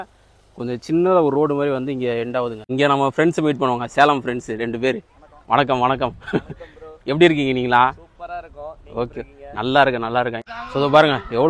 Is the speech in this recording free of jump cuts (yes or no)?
no